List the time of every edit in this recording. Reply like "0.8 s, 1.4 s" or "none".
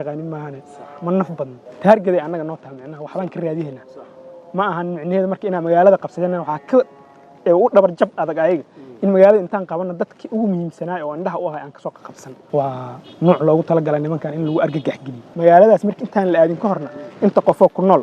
1.6 s, 12.5 s, 15.2 s